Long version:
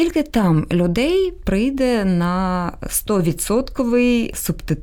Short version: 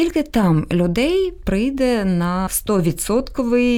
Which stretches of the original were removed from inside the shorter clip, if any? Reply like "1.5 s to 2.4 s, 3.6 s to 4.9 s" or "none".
2.5 s to 2.9 s